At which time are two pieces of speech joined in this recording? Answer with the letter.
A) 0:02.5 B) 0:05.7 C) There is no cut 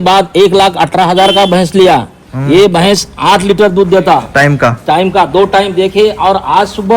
C